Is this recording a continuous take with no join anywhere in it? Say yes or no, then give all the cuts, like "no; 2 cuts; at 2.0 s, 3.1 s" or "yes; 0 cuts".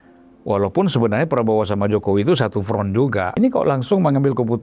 no; 1 cut; at 3.3 s